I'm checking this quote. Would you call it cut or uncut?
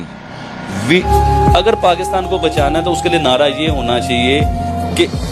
cut